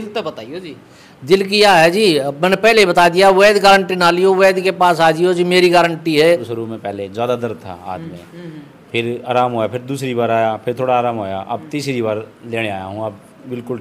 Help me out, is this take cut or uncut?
cut